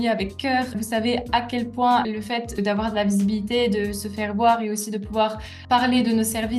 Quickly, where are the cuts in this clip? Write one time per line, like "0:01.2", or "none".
0:02.5